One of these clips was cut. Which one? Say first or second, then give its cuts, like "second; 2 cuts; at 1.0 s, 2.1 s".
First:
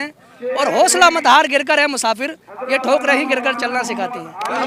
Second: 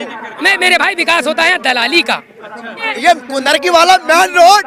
second; 1 cut; at 2.9 s